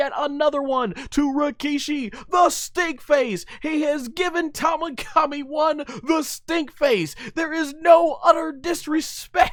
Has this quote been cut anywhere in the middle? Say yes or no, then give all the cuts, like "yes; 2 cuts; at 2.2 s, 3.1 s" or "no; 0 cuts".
no; 0 cuts